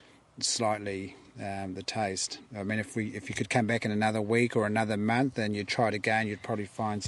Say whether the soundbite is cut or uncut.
uncut